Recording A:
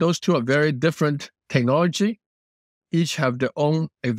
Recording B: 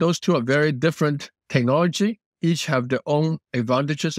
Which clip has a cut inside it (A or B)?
B